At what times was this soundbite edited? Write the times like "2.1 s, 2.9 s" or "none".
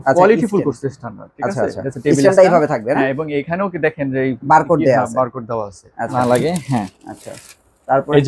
6.1 s